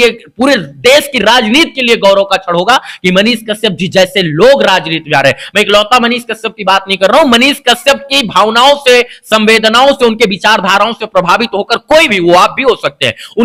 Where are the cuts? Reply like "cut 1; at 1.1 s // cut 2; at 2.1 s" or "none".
none